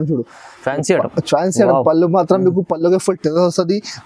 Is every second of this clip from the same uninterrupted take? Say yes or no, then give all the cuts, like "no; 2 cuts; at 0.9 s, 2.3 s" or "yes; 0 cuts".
yes; 0 cuts